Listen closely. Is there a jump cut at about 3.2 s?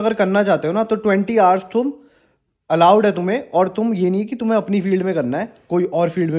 no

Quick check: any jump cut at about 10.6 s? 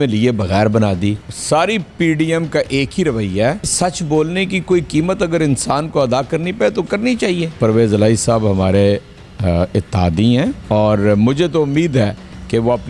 yes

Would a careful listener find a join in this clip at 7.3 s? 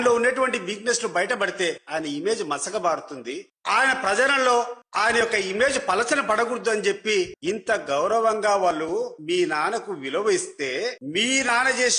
yes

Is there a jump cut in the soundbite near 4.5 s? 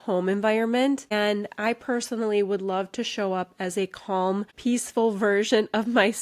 yes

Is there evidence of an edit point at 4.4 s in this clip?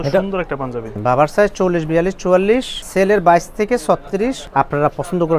yes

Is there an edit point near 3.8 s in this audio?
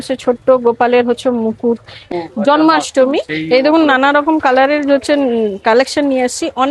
no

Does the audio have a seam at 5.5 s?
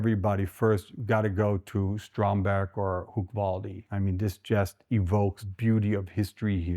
yes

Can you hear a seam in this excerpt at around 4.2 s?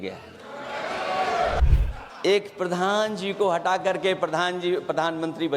no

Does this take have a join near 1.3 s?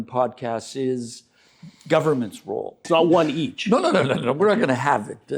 no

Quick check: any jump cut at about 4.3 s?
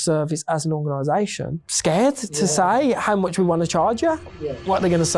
yes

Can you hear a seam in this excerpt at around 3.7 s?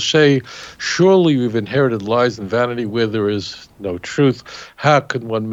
no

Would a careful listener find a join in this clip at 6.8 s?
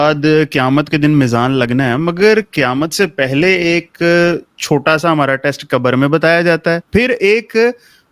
yes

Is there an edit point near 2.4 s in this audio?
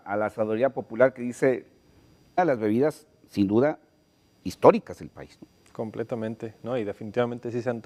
no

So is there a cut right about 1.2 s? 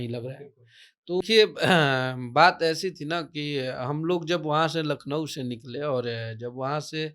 yes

